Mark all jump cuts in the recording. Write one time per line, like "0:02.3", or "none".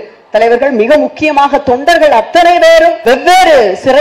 0:03.0